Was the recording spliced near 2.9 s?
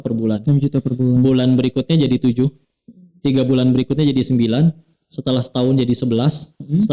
no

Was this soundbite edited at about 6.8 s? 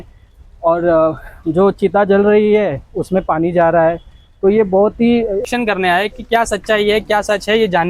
no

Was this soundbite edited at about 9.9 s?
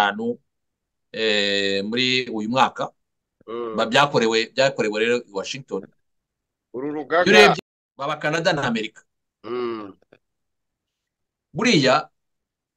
no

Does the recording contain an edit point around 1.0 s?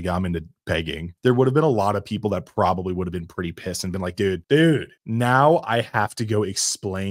yes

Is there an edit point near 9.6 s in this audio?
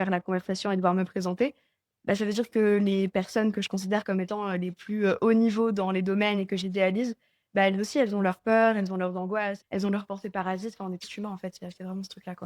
yes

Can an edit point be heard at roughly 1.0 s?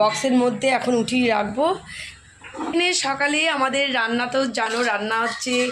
no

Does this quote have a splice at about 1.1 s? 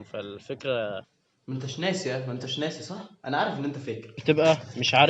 yes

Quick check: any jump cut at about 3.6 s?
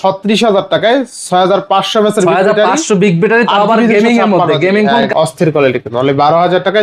no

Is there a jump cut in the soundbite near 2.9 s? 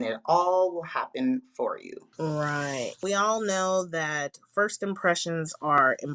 yes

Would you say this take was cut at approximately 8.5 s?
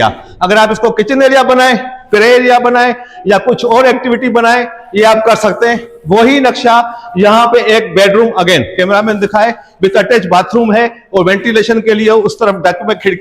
no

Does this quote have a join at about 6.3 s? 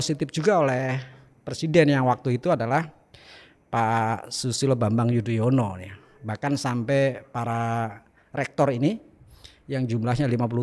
no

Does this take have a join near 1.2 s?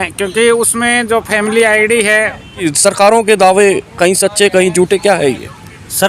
no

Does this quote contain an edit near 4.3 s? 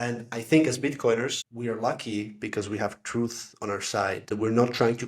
yes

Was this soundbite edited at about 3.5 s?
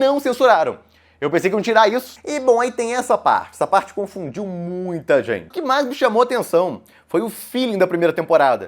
no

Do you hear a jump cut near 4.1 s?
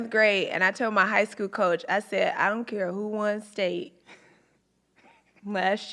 no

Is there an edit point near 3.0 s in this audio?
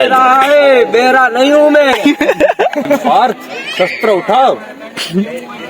yes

